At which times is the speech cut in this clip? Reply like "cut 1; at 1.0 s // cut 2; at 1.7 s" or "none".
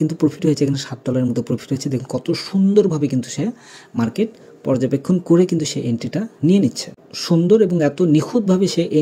cut 1; at 7.1 s